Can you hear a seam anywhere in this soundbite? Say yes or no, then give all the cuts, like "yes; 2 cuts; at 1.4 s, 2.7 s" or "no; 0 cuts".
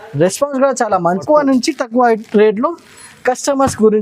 yes; 1 cut; at 1.2 s